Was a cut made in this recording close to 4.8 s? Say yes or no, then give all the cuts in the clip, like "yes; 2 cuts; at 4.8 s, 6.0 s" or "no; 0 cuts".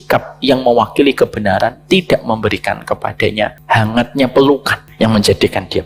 yes; 2 cuts; at 3.6 s, 4.8 s